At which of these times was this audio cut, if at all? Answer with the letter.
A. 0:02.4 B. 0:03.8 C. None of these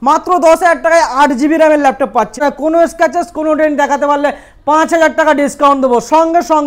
A